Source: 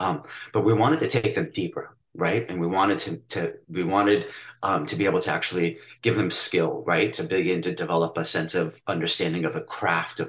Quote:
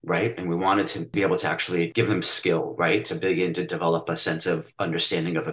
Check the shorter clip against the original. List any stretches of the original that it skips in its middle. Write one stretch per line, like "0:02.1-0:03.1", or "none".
0:03.2-0:04.9
0:05.7-0:06.0